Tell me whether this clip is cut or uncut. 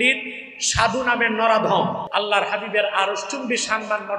cut